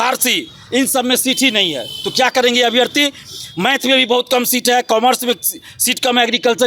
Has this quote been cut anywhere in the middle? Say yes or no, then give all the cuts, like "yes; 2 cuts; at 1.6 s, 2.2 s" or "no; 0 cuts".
no; 0 cuts